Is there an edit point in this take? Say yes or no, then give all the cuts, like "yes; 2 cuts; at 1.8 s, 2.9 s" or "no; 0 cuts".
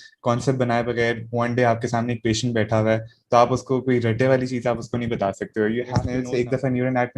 yes; 1 cut; at 6.1 s